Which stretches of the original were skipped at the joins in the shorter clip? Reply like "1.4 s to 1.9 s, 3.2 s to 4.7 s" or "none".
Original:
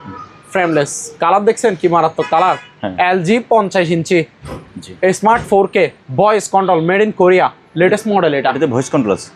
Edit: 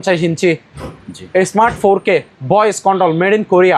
none

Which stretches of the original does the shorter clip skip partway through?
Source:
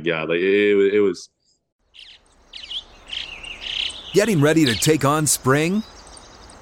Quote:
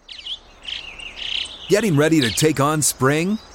none

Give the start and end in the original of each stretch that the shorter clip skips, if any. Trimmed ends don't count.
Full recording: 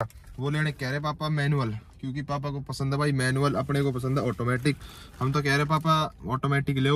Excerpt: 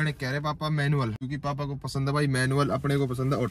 1.8 s to 2.1 s

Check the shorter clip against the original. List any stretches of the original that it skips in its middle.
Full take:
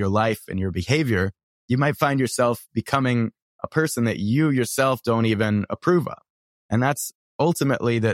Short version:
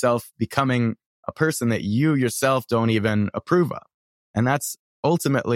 none

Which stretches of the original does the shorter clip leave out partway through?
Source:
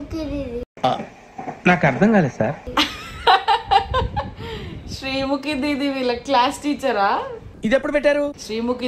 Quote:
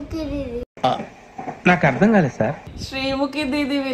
2.6 s to 4.7 s

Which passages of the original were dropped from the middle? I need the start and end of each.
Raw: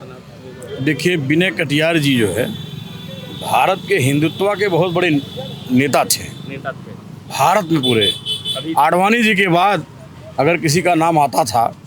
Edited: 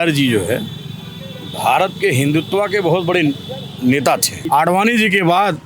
6.2 s to 8.6 s

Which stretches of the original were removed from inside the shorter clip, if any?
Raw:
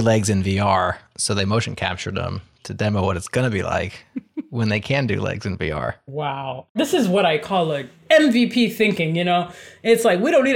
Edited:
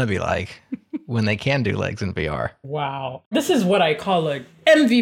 none

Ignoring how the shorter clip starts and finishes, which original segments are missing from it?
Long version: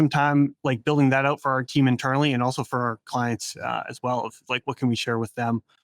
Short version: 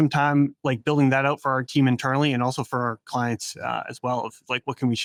none

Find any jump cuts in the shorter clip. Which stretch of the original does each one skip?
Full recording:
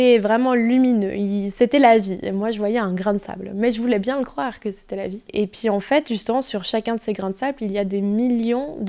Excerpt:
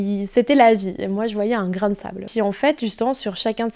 3.5 s to 5.5 s

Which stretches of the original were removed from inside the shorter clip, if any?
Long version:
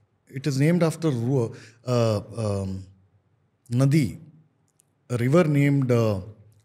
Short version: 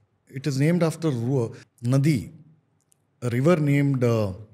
1.7 s to 3.5 s

